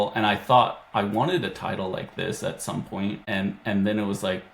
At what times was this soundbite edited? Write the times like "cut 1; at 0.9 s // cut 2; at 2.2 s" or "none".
cut 1; at 3.2 s